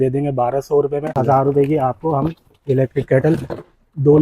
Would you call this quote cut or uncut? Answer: cut